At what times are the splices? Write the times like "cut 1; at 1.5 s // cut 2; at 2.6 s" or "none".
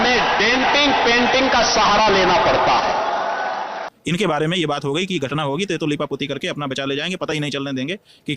cut 1; at 3.9 s

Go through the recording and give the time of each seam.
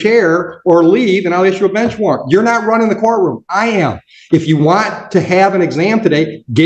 none

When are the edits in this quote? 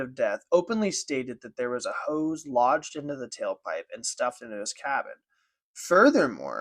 none

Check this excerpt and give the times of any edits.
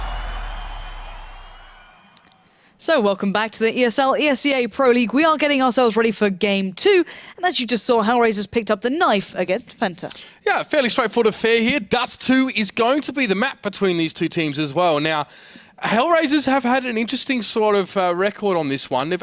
none

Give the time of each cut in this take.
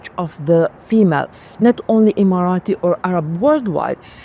none

